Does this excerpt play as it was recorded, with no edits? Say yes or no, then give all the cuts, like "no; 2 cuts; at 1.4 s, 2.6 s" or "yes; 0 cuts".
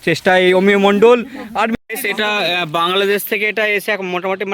no; 1 cut; at 1.3 s